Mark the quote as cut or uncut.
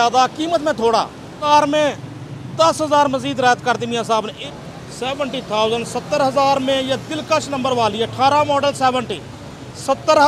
cut